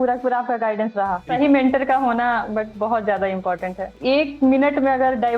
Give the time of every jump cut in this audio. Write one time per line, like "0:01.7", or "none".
0:01.3
0:03.9